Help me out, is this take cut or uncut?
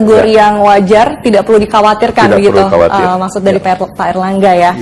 uncut